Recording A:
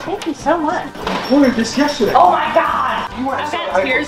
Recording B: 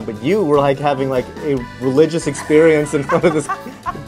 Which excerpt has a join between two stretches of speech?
A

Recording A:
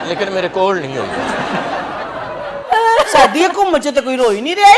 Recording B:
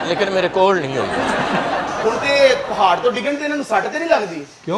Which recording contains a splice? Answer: A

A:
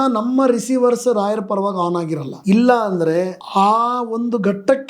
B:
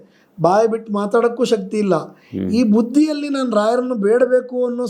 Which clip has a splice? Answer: A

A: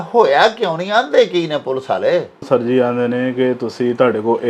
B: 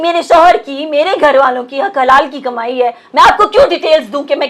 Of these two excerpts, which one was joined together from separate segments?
A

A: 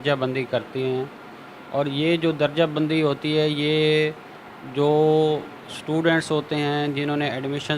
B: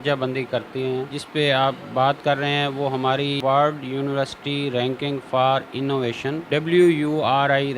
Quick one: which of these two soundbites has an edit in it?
B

